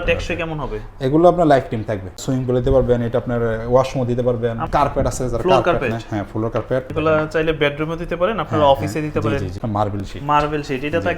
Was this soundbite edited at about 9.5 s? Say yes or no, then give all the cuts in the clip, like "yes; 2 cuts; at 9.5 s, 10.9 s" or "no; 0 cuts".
yes; 4 cuts; at 2.2 s, 4.6 s, 6.9 s, 9.5 s